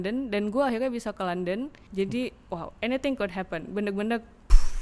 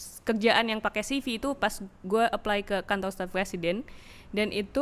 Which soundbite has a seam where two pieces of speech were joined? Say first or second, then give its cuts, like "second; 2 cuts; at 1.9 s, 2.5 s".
first; 1 cut; at 1.8 s